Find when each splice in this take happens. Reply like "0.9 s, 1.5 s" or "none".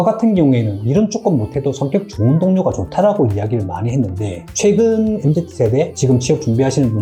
none